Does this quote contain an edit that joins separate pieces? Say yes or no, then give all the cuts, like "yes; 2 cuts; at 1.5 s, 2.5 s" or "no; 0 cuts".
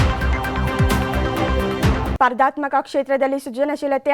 yes; 1 cut; at 2.1 s